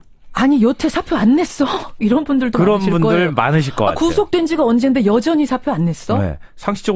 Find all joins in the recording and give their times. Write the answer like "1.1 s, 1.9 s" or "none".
5.4 s